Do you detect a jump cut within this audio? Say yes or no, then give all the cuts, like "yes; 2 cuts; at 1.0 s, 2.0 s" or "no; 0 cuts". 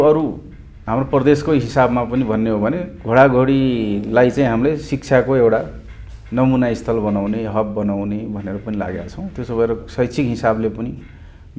no; 0 cuts